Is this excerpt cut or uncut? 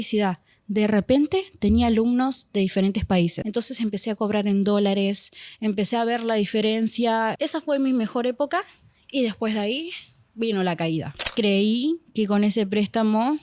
cut